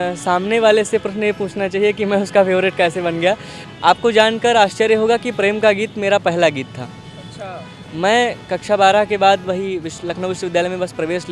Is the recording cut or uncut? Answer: cut